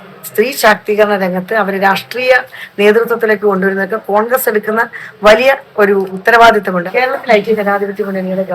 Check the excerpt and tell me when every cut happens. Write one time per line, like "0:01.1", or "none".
0:06.1
0:06.9